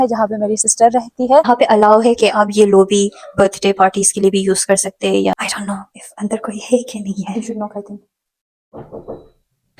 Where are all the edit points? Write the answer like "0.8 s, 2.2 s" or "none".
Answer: 1.5 s, 5.3 s